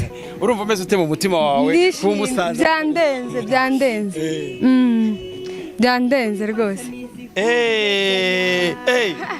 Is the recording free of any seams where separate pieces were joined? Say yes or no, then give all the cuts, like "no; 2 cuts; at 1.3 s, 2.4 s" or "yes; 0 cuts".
yes; 0 cuts